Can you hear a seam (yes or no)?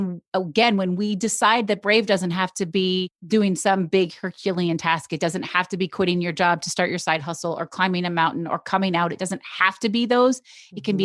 yes